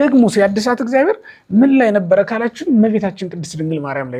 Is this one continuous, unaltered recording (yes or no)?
yes